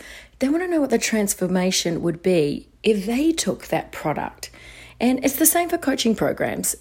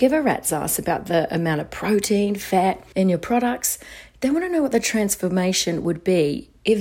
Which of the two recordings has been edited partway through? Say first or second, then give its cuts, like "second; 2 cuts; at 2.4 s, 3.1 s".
second; 1 cut; at 2.8 s